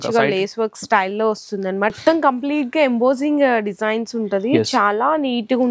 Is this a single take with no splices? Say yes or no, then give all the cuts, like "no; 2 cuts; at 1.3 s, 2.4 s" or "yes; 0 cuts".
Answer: no; 1 cut; at 1.9 s